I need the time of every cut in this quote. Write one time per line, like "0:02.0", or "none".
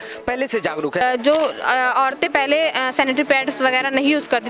0:01.0